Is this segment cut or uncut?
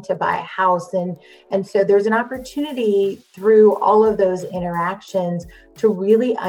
uncut